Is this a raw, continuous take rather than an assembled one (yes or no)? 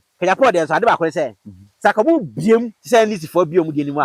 yes